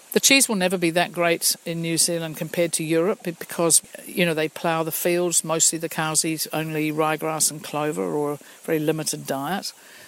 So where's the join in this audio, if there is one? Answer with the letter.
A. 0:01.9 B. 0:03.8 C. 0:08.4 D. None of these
B